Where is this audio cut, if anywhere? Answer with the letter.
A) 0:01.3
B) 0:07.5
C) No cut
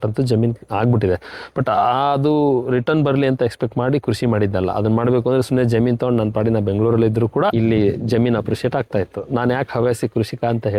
B